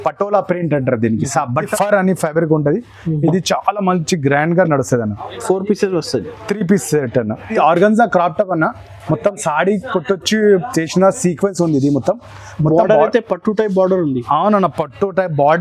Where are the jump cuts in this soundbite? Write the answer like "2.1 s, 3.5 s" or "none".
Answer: 1.7 s, 7.6 s